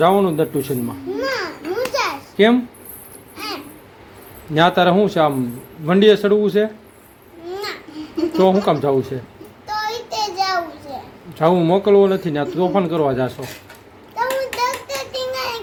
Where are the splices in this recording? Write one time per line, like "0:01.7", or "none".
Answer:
none